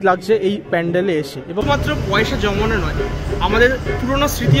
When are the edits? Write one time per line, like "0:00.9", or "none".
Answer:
0:01.6